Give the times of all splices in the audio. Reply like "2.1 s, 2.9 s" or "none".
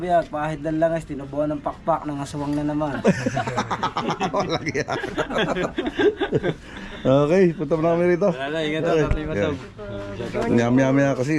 none